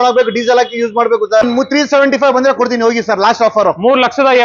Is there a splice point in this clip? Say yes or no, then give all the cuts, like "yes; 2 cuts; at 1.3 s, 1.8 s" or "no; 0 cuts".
yes; 1 cut; at 1.4 s